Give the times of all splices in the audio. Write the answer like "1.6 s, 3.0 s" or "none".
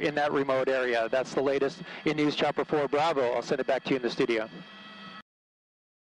none